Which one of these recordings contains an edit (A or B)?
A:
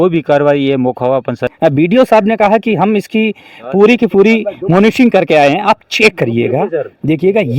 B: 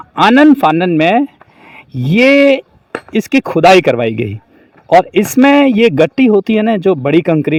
A